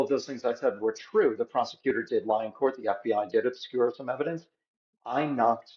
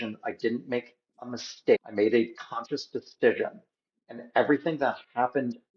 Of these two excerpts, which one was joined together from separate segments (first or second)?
second